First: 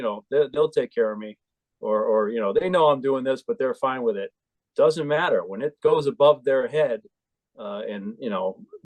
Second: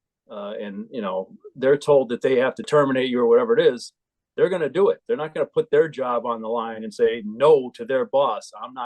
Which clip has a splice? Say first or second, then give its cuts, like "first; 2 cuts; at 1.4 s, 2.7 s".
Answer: second; 1 cut; at 2.7 s